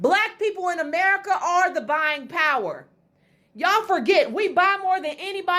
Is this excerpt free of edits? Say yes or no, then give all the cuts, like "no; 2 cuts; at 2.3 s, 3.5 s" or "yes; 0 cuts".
yes; 0 cuts